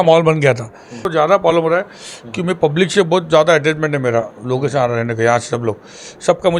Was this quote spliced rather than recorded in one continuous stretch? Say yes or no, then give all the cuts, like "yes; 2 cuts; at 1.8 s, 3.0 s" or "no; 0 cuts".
yes; 1 cut; at 1.1 s